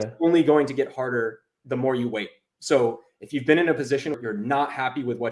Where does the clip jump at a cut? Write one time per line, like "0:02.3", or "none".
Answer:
0:04.2